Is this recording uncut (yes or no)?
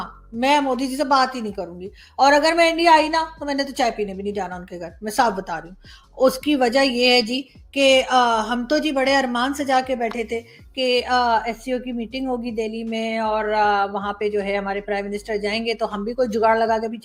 yes